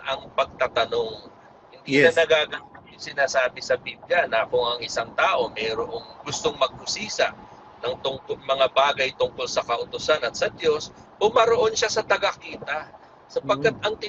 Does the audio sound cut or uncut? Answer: uncut